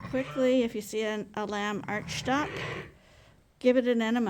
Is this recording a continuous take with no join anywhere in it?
yes; 0 cuts

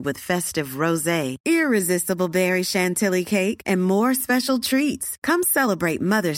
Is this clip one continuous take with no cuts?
yes; 0 cuts

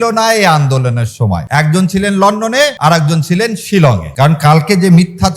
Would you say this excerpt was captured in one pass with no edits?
no; 3 cuts; at 1.4 s, 2.8 s, 4.1 s

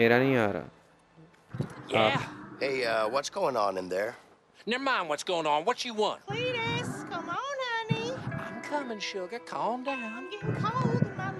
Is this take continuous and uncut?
yes; 0 cuts

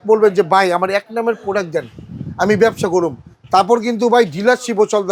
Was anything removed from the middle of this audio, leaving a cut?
no; 0 cuts

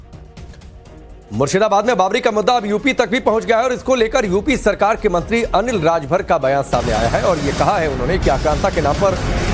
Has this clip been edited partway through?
no; 0 cuts

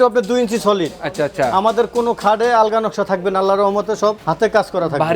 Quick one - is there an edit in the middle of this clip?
yes; 1 cut; at 4.2 s

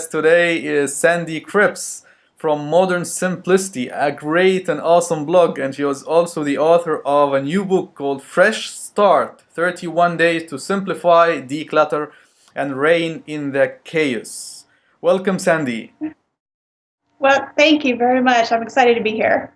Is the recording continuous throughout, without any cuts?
yes; 0 cuts

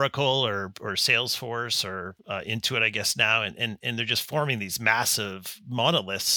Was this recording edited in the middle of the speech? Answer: yes; 1 cut; at 2.2 s

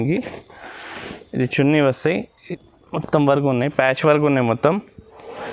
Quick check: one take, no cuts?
no; 1 cut; at 2.4 s

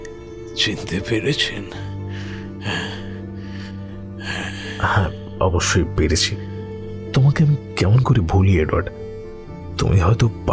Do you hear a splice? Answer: yes; 1 cut; at 1.3 s

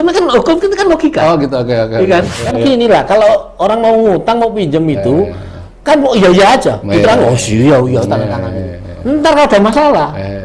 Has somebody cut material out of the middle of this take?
yes; 1 cut; at 2.4 s

